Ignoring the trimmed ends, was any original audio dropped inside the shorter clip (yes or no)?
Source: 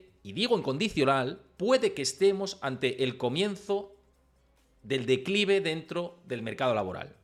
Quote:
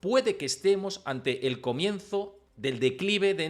yes